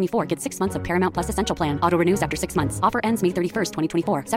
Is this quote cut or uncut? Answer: uncut